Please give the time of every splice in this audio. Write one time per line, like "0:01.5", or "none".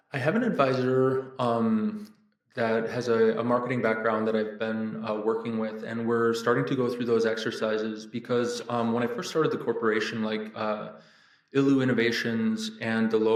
none